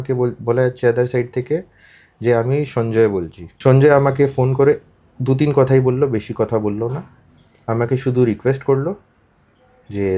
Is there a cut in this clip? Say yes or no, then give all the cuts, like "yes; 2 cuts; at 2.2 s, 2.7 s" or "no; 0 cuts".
yes; 1 cut; at 3.4 s